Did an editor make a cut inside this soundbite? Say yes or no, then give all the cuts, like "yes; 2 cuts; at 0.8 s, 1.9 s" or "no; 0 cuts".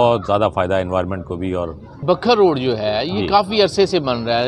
yes; 1 cut; at 2.0 s